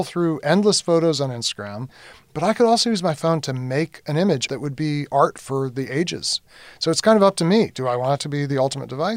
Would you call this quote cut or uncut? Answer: cut